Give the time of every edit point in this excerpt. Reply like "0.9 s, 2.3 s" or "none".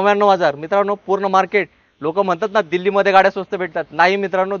none